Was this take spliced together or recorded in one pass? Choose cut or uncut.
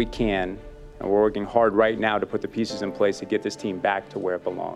uncut